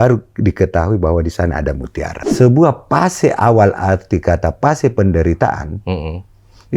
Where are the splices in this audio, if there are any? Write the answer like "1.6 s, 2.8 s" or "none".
2.2 s